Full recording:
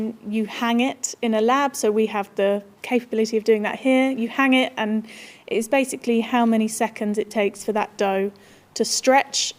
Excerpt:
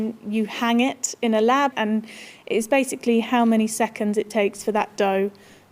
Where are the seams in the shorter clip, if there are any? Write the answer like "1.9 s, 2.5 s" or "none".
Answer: 1.7 s